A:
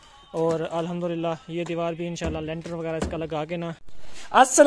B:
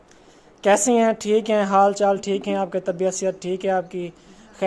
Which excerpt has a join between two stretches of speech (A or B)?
A